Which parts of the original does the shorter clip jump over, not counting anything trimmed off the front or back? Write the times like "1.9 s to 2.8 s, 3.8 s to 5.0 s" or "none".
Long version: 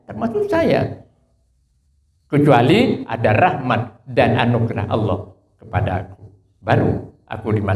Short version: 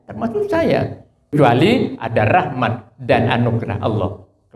1.3 s to 2.4 s